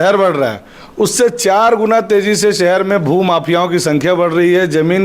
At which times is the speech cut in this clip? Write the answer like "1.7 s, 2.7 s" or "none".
none